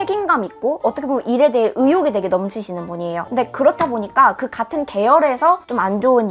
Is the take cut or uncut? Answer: uncut